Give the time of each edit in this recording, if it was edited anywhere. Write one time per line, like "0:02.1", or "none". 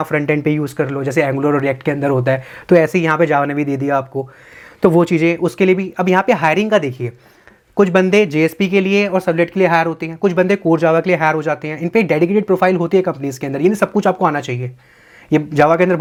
none